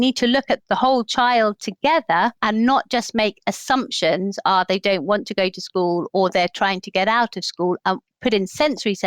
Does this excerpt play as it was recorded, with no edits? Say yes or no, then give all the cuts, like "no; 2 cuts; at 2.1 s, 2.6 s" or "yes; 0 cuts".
no; 3 cuts; at 2.4 s, 6.1 s, 8.1 s